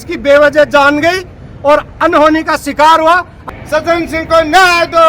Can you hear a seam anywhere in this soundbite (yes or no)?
yes